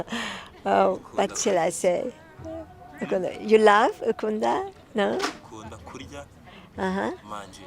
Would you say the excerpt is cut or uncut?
uncut